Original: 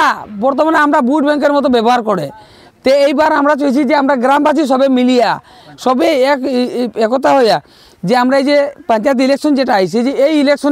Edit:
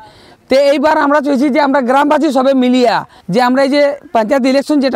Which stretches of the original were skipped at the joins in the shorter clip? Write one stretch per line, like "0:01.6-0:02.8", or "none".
0:05.5-0:07.9